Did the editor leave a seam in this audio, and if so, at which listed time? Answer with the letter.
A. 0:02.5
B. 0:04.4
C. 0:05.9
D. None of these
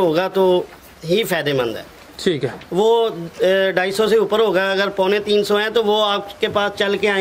D